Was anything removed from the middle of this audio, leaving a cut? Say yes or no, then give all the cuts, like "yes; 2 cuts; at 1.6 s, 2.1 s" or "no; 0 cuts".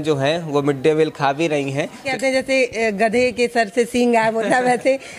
yes; 1 cut; at 2.0 s